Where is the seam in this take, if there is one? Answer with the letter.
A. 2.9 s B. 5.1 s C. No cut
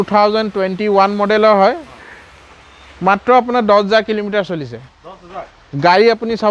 C